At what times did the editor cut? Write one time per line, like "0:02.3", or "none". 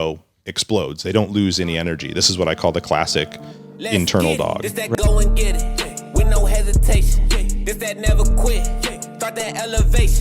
0:04.7

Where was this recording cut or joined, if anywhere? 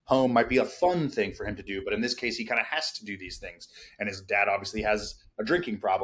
none

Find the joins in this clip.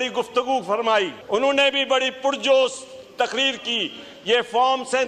0:01.2

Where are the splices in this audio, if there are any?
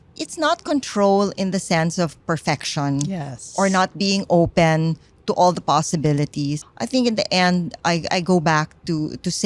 0:06.7

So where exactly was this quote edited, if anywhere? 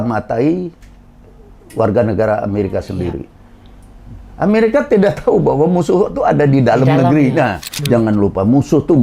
0:07.7

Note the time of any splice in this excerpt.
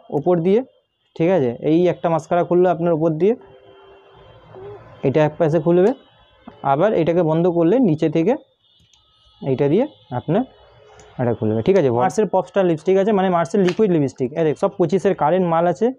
0:12.0
0:14.6

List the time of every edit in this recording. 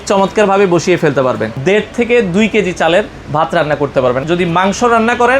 0:01.5
0:04.2

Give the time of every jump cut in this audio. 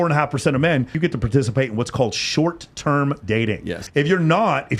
0:01.0
0:03.8

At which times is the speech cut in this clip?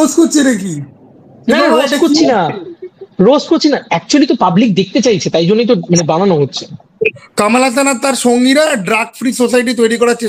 0:07.2

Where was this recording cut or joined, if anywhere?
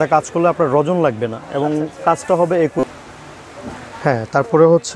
0:02.8

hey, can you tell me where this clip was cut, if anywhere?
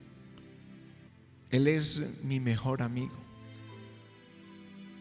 0:01.1
0:03.4

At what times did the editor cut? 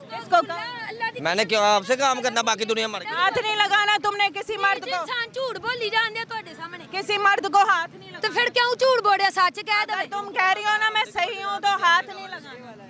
none

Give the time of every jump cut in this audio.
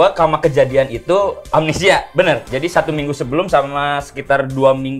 0:01.5

